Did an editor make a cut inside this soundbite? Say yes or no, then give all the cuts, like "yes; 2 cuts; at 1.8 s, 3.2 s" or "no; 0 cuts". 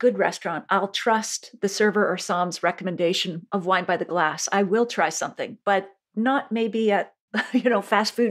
no; 0 cuts